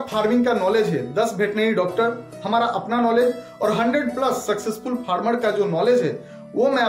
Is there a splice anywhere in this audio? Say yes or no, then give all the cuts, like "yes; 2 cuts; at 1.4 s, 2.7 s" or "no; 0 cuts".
no; 0 cuts